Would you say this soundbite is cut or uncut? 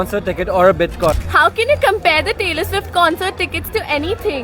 cut